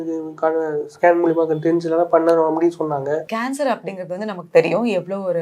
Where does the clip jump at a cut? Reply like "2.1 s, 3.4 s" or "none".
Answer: 3.3 s